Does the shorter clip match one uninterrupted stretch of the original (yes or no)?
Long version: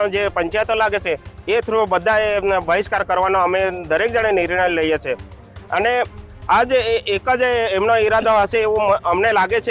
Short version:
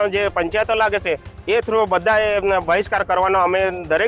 yes